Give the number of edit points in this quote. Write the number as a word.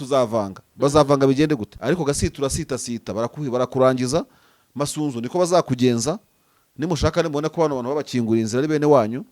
one